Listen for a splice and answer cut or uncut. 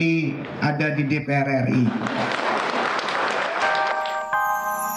cut